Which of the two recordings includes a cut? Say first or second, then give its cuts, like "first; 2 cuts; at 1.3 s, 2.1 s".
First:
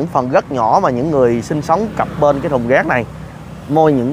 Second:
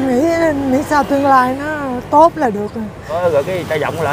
second; 1 cut; at 3.1 s